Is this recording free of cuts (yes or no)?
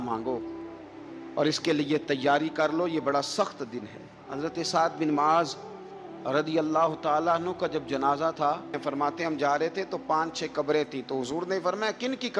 no